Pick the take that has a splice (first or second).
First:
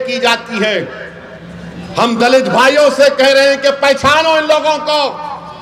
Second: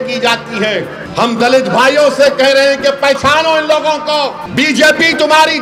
second